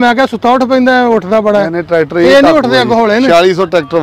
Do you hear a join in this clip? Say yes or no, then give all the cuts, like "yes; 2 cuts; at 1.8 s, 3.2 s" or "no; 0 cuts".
no; 0 cuts